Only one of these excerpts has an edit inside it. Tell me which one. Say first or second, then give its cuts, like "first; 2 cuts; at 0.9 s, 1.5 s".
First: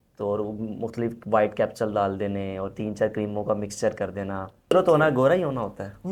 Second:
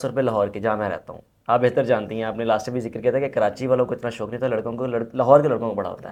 first; 1 cut; at 4.7 s